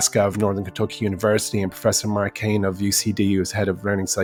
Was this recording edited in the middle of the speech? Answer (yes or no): no